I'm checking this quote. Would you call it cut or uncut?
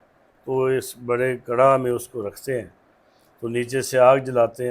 uncut